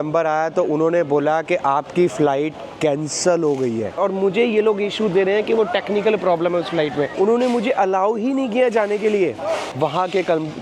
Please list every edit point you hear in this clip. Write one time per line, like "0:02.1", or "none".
0:04.0
0:07.1
0:09.7

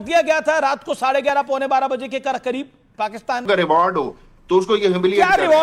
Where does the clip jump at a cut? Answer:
0:03.5

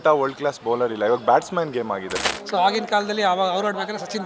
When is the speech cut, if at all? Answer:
0:02.3

